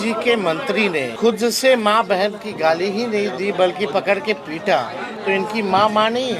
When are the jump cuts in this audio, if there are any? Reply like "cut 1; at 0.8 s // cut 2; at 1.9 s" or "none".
cut 1; at 1.1 s // cut 2; at 5.1 s